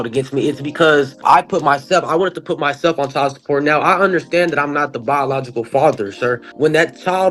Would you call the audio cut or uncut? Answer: cut